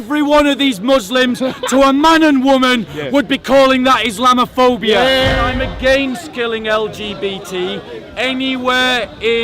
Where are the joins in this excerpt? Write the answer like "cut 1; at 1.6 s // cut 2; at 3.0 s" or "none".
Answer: cut 1; at 5.4 s